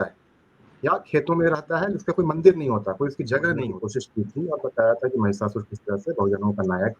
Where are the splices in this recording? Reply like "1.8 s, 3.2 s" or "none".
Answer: 3.8 s